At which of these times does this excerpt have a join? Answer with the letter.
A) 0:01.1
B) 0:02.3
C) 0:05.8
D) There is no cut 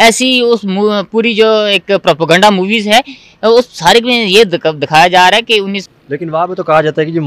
C